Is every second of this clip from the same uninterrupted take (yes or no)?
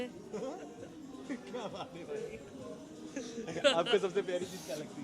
yes